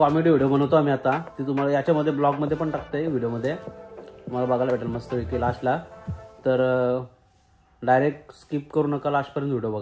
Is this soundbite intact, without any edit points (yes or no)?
yes